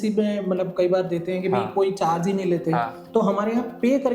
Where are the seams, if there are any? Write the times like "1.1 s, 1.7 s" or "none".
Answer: 3.0 s